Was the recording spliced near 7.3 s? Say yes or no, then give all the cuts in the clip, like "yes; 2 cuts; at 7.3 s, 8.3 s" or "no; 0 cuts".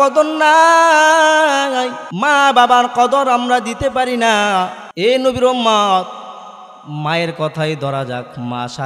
no; 2 cuts; at 2.0 s, 4.8 s